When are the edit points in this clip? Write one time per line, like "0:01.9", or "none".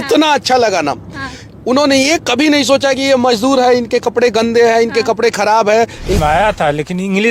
0:06.2